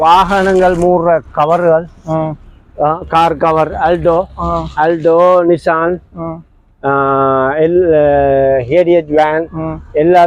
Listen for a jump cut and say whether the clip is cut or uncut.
uncut